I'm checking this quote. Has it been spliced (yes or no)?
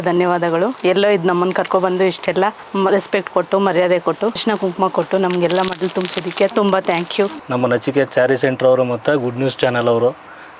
yes